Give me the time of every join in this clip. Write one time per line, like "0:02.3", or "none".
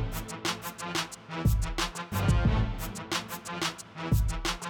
none

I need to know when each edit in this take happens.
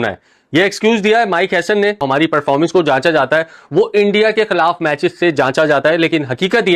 none

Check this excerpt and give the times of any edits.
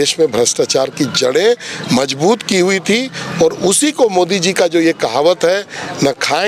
none

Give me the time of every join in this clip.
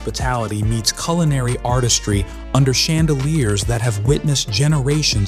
none

